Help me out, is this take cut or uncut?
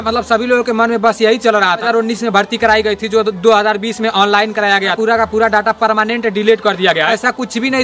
cut